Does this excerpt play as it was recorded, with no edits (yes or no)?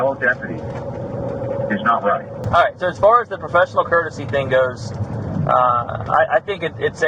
no